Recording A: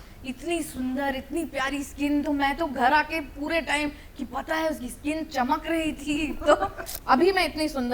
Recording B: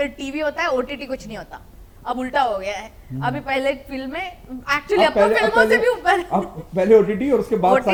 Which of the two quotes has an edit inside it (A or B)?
A